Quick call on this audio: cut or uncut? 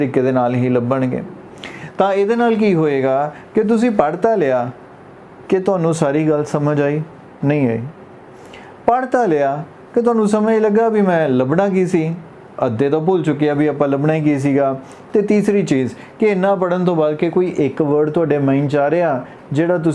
uncut